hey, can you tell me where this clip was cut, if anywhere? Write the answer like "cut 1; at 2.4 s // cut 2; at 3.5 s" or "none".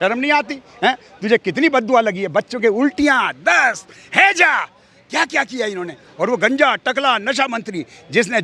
none